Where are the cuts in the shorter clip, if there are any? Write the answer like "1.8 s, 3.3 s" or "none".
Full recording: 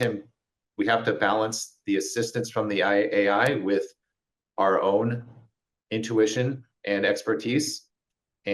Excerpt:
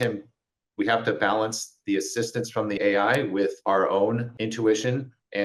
2.8 s, 3.6 s, 4.3 s

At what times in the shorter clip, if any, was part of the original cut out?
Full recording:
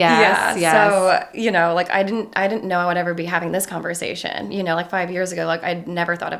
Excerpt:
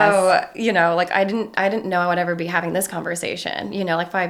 none

